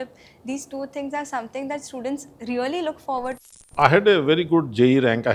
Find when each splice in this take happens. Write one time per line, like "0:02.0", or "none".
0:03.4